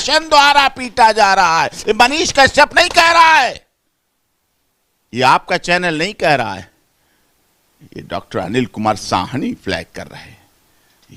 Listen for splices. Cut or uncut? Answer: uncut